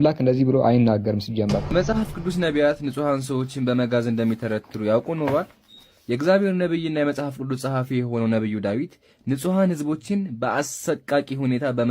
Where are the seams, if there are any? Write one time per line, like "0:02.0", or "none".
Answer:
0:01.7